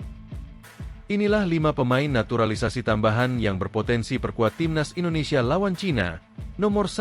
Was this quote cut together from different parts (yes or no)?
yes